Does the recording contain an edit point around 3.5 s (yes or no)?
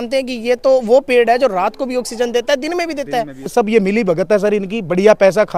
yes